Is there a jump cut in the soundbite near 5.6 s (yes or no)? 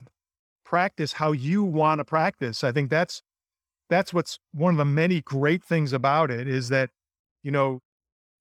no